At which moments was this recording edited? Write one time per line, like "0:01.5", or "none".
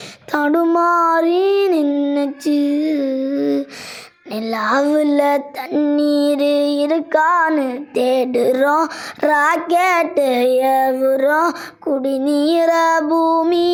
none

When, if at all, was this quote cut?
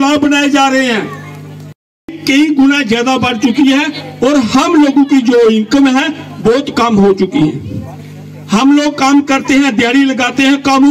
0:01.8

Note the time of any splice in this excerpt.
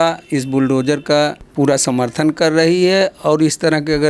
0:01.4

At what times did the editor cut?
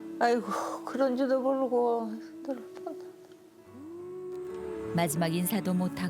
0:04.7

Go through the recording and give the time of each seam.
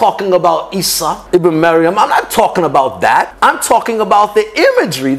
0:01.2
0:03.3

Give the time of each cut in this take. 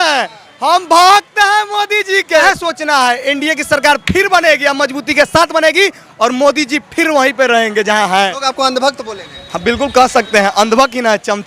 0:02.4
0:08.3

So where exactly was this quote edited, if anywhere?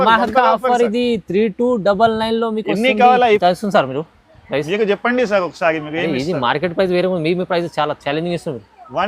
0:03.4

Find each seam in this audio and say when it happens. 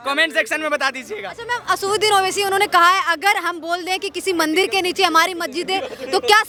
none

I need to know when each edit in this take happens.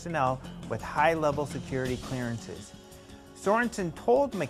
0:03.6

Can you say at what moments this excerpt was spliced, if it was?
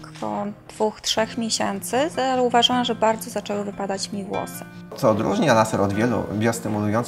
0:04.9

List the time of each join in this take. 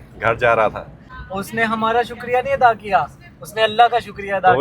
0:01.2

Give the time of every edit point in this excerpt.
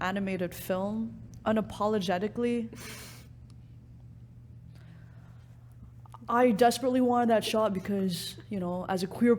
none

